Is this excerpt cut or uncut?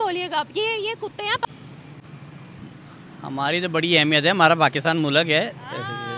cut